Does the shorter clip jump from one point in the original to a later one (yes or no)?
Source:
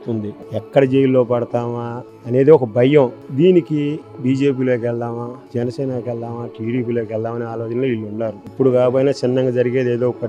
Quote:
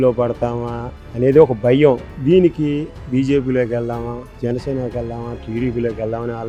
no